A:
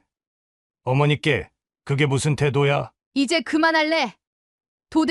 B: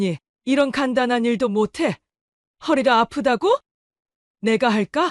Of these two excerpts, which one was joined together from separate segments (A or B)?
A